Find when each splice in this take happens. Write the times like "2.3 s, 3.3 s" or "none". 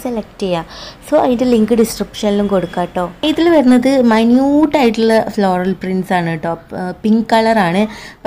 3.2 s